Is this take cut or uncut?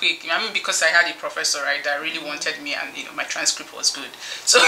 uncut